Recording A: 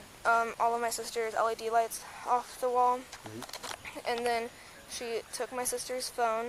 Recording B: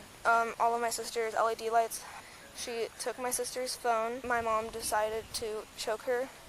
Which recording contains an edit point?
B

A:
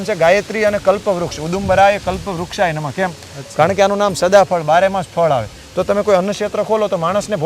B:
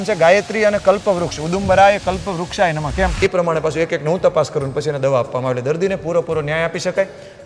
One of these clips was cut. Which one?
B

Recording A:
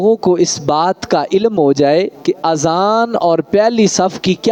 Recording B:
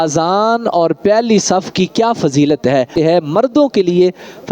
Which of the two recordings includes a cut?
B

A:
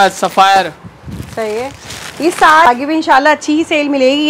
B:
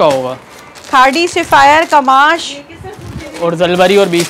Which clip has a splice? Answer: A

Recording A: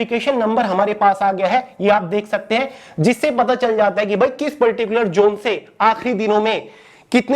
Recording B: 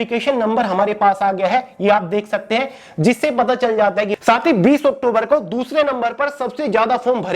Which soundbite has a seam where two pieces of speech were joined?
B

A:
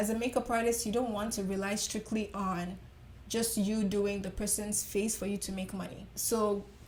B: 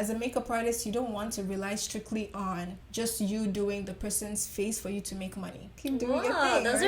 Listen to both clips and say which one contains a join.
B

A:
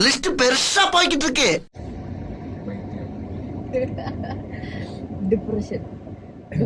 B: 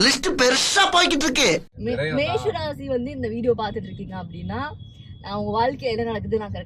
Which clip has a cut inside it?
B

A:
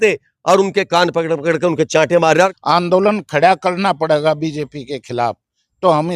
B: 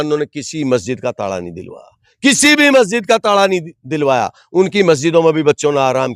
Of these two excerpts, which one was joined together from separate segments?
A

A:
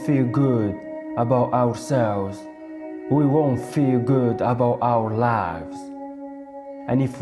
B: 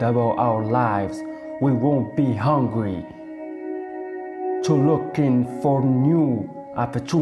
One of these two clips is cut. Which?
B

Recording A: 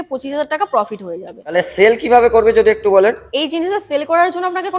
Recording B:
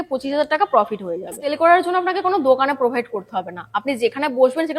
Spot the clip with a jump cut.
B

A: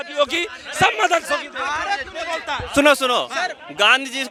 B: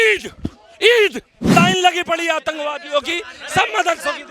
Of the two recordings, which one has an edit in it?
B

